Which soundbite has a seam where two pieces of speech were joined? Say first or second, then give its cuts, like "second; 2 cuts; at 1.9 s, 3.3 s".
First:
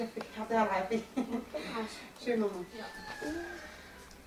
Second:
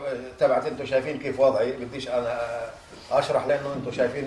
first; 1 cut; at 1.4 s